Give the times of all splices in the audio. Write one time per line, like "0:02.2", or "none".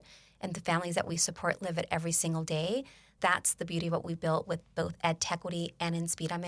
0:03.1